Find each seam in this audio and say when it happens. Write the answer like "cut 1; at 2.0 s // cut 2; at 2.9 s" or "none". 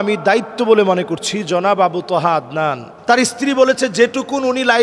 cut 1; at 2.9 s